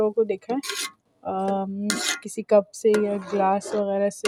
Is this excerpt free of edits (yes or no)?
yes